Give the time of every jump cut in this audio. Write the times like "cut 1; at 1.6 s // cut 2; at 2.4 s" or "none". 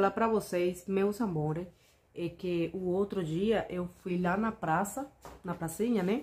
none